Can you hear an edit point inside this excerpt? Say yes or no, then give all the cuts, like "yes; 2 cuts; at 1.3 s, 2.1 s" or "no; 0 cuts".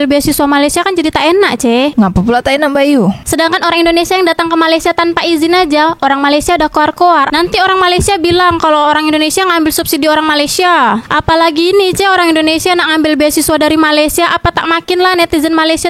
yes; 1 cut; at 11.0 s